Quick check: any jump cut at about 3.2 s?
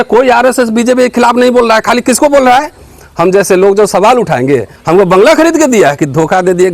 no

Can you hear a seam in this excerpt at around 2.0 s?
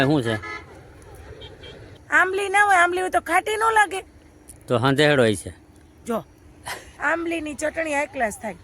yes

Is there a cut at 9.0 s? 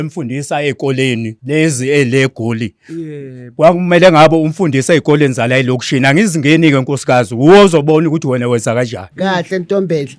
yes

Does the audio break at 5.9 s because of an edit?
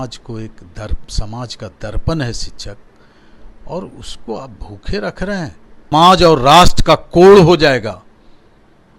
yes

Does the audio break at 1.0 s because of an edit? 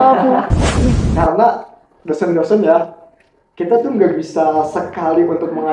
yes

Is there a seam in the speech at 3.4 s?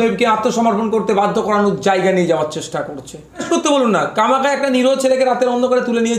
yes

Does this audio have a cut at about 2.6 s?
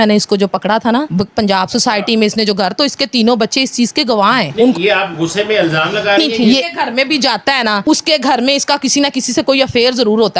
no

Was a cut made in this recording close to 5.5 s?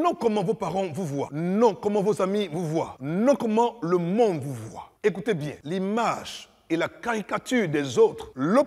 yes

